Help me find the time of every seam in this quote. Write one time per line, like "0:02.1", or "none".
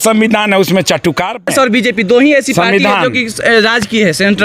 0:01.5